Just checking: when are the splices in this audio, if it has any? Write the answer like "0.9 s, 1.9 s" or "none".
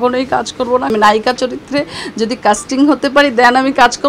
0.9 s